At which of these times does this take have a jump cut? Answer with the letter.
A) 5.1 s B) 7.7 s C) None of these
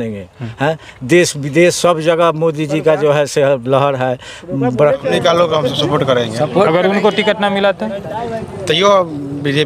A